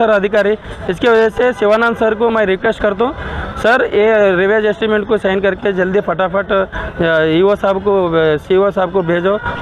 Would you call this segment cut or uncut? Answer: uncut